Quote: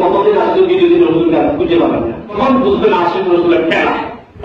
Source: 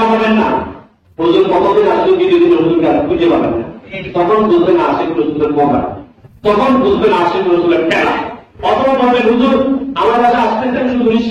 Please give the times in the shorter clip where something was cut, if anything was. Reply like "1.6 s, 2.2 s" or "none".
2.4 s